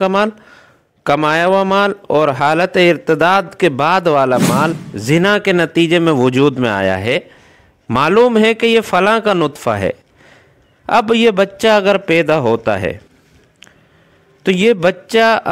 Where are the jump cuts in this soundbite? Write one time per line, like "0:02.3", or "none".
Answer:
0:04.9